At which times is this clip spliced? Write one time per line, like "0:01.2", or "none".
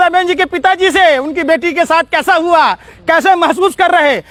none